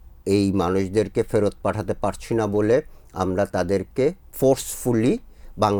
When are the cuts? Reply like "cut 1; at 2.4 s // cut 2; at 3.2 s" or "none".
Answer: none